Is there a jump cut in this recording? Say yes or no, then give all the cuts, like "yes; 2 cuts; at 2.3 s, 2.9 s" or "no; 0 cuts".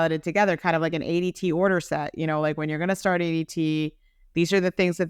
no; 0 cuts